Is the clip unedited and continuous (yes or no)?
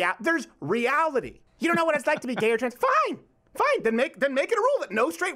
no